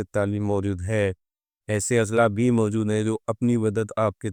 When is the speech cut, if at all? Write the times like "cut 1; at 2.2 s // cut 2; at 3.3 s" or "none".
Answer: none

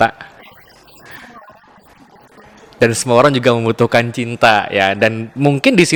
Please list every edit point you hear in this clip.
none

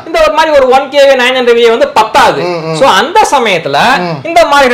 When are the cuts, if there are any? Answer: none

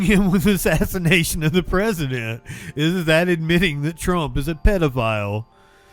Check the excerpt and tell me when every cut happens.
none

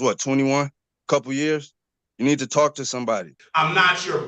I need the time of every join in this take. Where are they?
cut 1; at 3.4 s

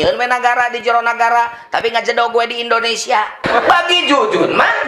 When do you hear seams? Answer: cut 1; at 3.4 s

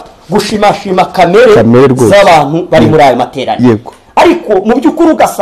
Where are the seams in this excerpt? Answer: none

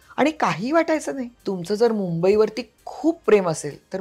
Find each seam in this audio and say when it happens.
cut 1; at 1.3 s

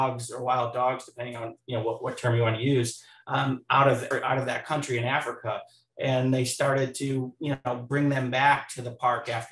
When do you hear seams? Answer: cut 1; at 4.1 s

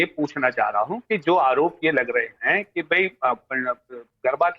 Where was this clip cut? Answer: cut 1; at 3.1 s

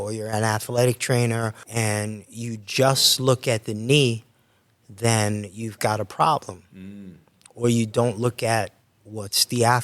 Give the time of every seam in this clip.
cut 1; at 1.6 s

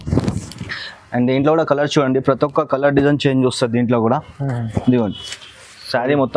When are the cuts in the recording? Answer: cut 1; at 5.3 s

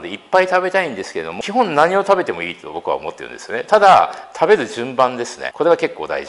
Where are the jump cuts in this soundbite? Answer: cut 1; at 1.2 s // cut 2; at 5.4 s

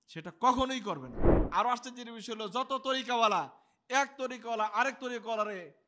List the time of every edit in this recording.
cut 1; at 1.4 s

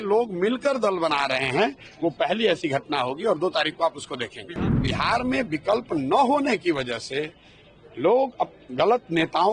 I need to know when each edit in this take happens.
cut 1; at 4.6 s

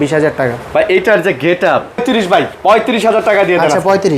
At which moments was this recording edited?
cut 1; at 2.0 s

